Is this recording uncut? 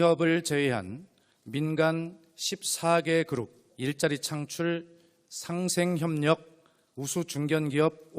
no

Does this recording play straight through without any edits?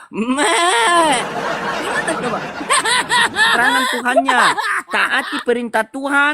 no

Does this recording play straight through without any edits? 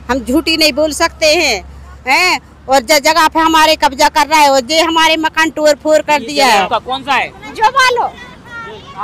no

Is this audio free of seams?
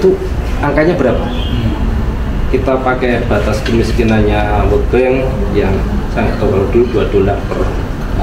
yes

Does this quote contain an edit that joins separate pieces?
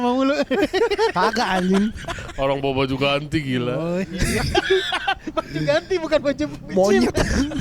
no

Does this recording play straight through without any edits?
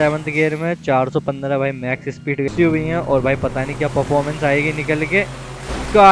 no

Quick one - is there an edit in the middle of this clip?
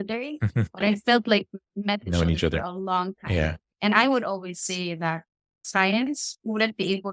yes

